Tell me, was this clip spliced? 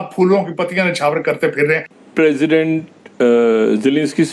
yes; 1 cut; at 2.0 s

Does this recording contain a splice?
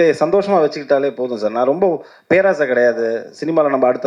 no; 0 cuts

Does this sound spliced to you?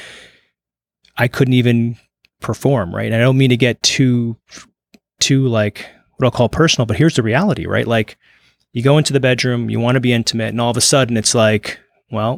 no; 0 cuts

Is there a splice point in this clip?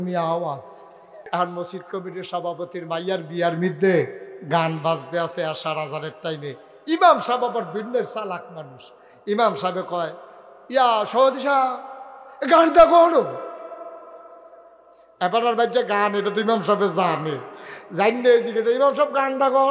yes; 1 cut; at 1.3 s

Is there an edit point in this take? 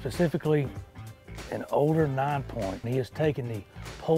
yes; 1 cut; at 2.9 s

